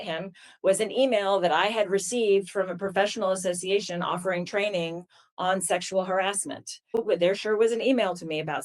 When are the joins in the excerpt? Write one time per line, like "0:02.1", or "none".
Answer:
0:07.0